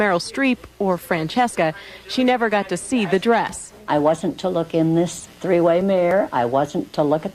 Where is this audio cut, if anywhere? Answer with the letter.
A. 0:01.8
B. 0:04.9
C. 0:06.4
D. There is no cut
D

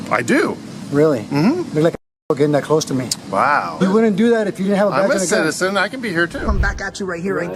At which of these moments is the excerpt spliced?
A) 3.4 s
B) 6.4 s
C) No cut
B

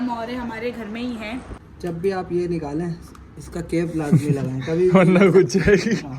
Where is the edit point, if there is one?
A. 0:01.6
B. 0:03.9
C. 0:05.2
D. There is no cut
A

